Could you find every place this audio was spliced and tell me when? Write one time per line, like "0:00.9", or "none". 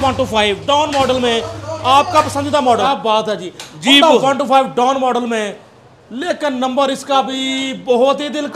0:02.8